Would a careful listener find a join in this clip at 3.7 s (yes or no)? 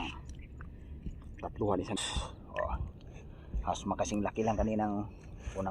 no